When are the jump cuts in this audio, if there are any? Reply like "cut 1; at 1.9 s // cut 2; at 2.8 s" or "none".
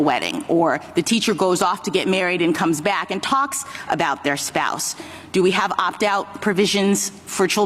none